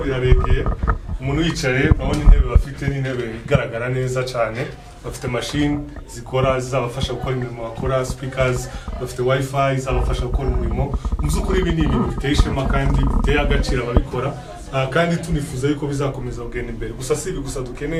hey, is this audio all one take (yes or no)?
yes